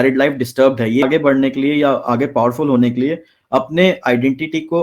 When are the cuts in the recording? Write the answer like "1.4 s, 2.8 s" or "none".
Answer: 1.0 s